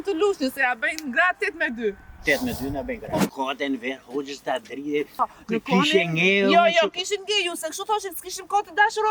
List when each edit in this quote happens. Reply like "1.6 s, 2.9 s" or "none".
3.3 s, 5.2 s